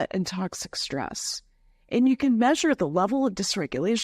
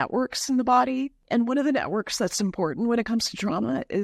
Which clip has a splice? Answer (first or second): second